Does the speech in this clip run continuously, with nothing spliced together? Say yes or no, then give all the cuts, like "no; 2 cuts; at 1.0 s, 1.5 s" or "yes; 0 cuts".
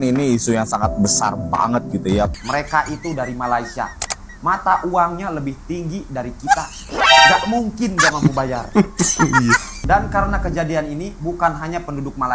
no; 2 cuts; at 2.3 s, 9.7 s